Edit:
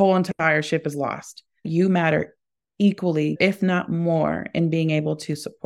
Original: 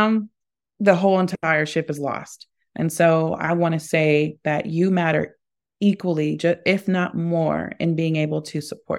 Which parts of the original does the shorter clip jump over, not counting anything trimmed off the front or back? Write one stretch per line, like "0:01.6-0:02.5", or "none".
0:02.7-0:04.7
0:06.4-0:06.6